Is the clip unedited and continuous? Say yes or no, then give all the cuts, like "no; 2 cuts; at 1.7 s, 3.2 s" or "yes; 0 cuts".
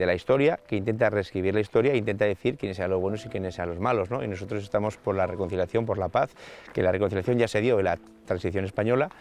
yes; 0 cuts